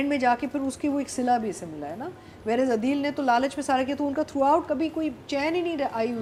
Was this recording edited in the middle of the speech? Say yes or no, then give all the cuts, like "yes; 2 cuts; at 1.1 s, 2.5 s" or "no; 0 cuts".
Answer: no; 0 cuts